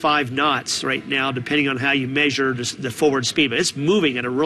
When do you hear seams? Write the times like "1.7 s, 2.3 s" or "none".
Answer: none